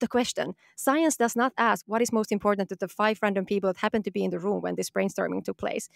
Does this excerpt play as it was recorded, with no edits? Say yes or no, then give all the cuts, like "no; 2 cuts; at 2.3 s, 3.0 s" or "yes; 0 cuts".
no; 1 cut; at 1.8 s